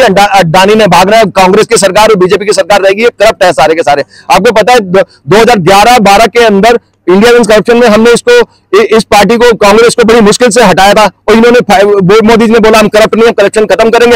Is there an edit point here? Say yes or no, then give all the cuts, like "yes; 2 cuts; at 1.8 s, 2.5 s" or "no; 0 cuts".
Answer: no; 0 cuts